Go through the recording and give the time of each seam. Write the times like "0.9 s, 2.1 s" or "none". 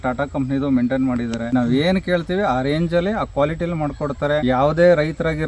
1.4 s, 4.4 s